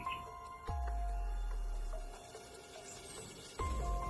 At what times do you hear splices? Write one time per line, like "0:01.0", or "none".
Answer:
none